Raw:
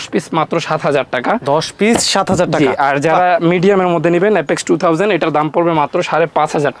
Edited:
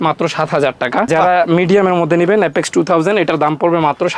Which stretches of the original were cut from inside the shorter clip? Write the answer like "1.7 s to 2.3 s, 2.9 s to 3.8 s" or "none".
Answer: 1.4 s to 3.0 s